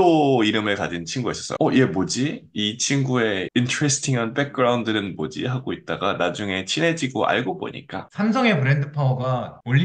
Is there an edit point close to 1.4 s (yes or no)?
yes